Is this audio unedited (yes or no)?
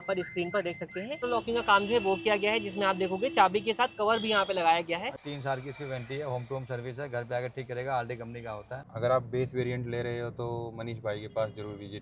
no